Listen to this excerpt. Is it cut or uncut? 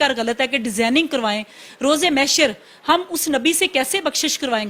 uncut